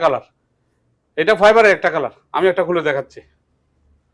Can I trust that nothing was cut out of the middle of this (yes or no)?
yes